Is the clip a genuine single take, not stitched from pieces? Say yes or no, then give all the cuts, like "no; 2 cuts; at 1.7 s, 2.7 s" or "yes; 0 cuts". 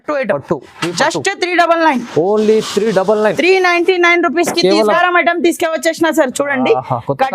no; 1 cut; at 4.8 s